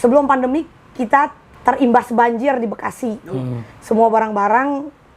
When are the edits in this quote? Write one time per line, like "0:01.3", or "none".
0:01.5

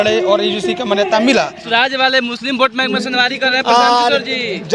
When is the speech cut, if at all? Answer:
0:01.6

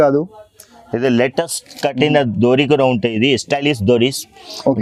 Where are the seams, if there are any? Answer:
none

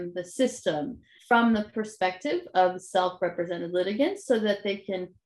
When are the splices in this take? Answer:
0:01.1

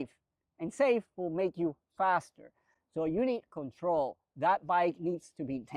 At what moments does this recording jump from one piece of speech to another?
none

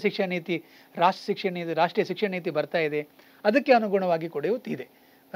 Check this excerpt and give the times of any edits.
none

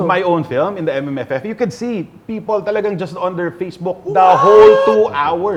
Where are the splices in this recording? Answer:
none

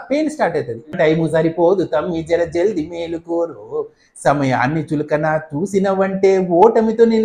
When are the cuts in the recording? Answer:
0:00.9

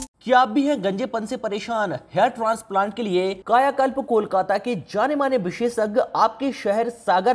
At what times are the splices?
none

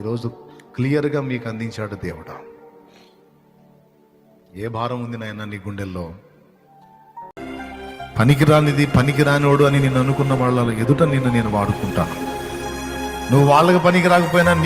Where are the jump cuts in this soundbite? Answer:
0:07.3

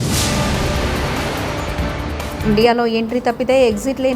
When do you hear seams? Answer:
0:02.4

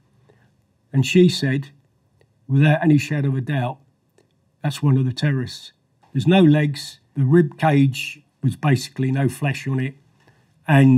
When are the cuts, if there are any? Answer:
0:06.0
0:07.1

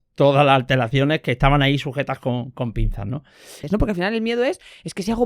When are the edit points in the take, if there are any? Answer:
0:03.6

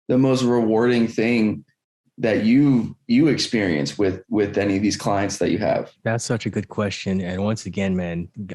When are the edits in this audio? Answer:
0:05.9

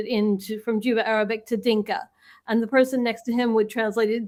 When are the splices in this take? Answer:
none

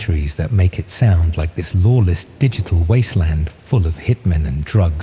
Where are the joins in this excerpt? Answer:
none

